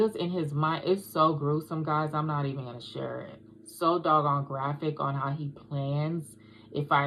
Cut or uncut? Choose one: uncut